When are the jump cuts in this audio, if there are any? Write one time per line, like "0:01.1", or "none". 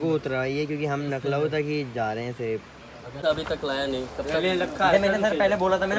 0:03.2